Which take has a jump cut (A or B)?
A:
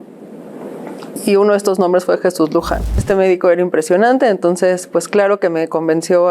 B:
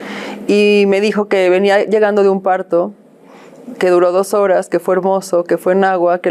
A